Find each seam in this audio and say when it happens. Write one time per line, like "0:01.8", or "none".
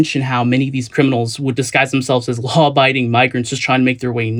none